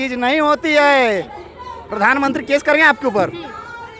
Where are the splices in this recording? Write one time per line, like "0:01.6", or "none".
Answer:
0:01.3